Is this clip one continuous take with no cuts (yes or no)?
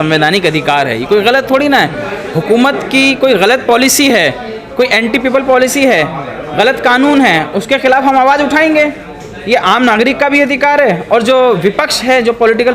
yes